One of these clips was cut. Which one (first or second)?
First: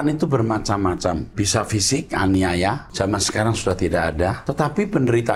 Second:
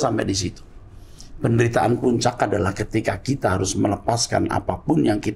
first